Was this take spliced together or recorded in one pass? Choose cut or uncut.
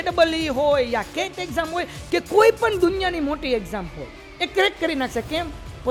uncut